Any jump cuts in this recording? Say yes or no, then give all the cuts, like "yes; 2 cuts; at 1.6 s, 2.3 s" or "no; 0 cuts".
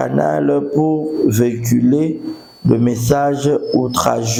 no; 0 cuts